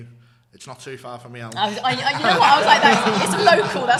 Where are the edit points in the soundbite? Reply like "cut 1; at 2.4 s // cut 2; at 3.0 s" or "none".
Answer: none